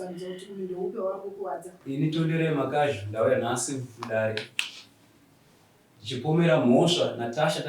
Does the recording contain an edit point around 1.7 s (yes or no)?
yes